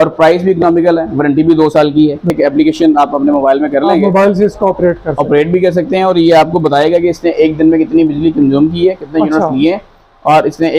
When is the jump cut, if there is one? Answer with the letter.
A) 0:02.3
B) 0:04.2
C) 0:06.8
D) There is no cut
A